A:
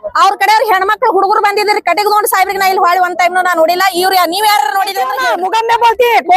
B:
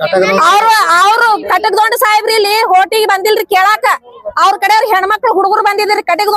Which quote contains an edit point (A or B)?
A